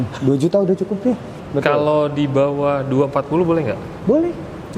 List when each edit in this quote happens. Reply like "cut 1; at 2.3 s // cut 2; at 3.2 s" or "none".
cut 1; at 1.3 s

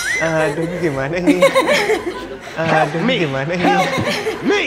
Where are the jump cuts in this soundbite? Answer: none

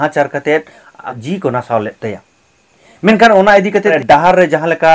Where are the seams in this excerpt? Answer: cut 1; at 1.2 s // cut 2; at 4.0 s

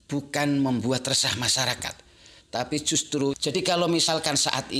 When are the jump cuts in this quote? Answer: cut 1; at 3.3 s

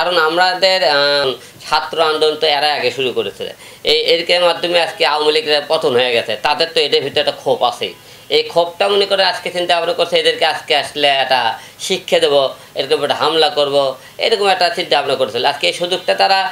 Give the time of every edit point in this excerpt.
cut 1; at 1.2 s

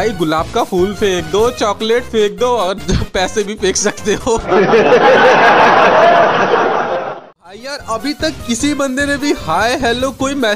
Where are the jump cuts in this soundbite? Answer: cut 1; at 7.1 s

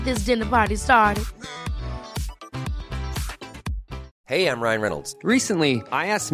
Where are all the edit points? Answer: cut 1; at 4.1 s

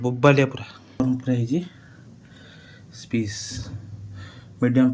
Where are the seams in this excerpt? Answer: cut 1; at 1.0 s

